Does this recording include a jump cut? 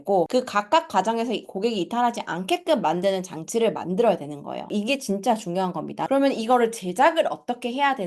yes; 1 cut; at 6.1 s

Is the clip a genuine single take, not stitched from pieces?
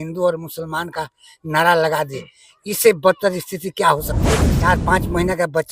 no; 1 cut; at 4.7 s

